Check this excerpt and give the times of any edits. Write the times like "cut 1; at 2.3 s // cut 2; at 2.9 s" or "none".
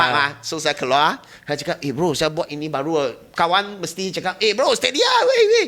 none